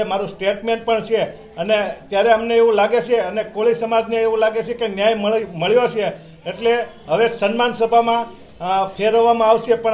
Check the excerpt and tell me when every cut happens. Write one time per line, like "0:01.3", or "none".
none